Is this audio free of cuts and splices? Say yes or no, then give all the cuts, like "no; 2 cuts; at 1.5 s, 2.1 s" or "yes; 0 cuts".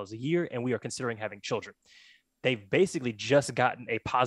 yes; 0 cuts